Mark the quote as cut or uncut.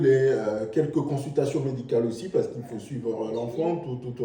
uncut